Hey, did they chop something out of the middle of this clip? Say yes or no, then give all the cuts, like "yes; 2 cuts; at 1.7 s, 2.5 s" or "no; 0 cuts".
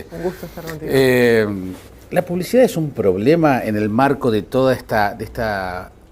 no; 0 cuts